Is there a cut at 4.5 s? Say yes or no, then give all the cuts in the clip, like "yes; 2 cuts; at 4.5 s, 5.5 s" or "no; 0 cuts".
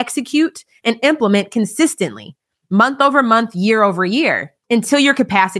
yes; 1 cut; at 4.5 s